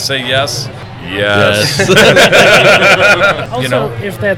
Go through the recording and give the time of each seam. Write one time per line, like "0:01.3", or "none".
0:03.4